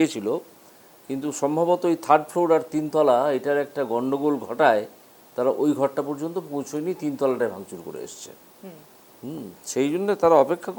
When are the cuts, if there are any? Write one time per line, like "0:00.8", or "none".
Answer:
none